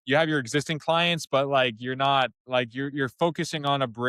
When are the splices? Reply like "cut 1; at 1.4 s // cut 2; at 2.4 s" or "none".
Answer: cut 1; at 2.4 s